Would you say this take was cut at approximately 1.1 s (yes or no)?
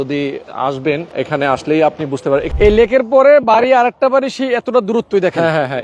yes